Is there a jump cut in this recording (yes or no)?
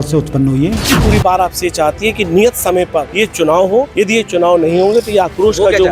yes